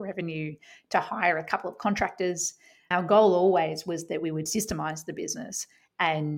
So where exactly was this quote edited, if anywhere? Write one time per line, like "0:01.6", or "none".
0:02.9